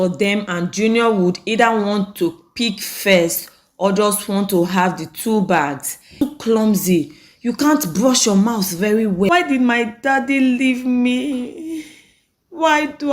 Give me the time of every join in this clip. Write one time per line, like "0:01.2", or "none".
0:06.1
0:09.3